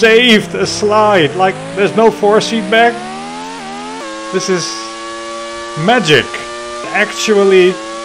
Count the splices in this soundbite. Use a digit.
2